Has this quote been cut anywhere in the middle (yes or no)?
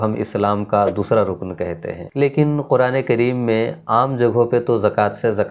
yes